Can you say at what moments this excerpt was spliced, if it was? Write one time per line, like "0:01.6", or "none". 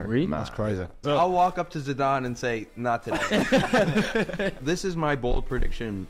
0:01.0
0:04.6